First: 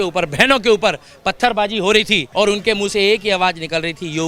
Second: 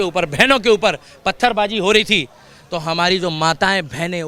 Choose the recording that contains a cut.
first; 1 cut; at 2.3 s

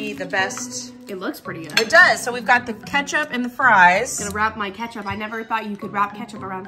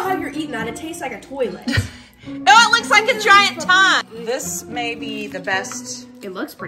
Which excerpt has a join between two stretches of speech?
second; 1 cut; at 4.1 s

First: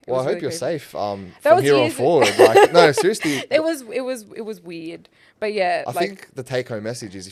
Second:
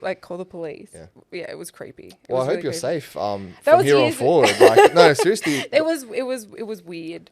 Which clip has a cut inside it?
second; 1 cut; at 1.1 s

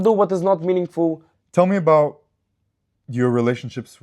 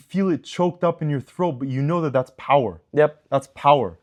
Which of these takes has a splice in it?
first; 1 cut; at 1.3 s

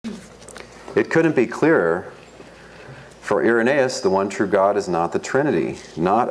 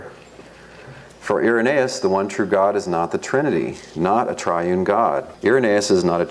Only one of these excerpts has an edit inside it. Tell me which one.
second; 1 cut; at 5.3 s

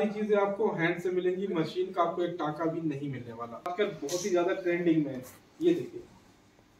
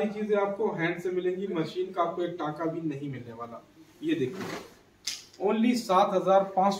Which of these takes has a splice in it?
first; 1 cut; at 3.9 s

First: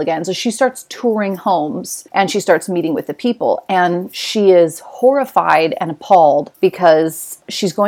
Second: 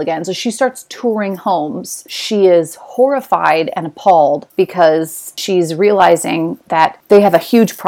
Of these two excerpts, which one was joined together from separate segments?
second; 2 cuts; at 2.0 s, 5.4 s

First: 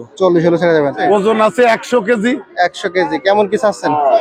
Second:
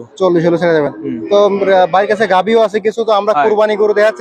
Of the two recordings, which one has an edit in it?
first; 1 cut; at 1.0 s

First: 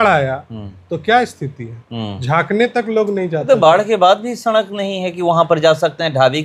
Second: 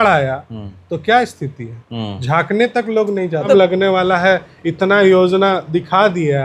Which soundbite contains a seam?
second; 1 cut; at 3.5 s

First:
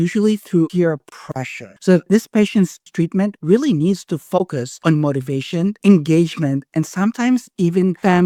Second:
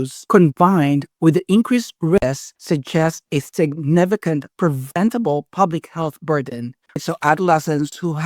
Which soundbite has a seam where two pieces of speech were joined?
second; 2 cuts; at 4.5 s, 7.0 s

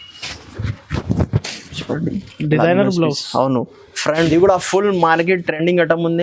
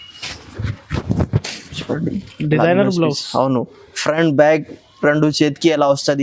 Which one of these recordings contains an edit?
first; 1 cut; at 4.3 s

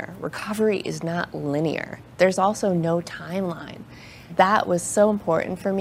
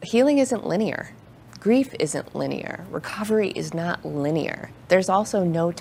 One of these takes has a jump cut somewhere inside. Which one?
first; 1 cut; at 4.2 s

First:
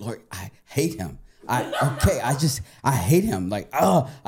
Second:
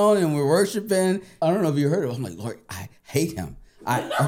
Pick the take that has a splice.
second; 1 cut; at 1.4 s

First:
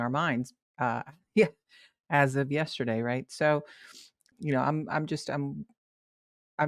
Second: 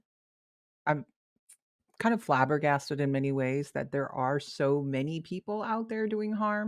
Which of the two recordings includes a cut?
first; 1 cut; at 4.3 s

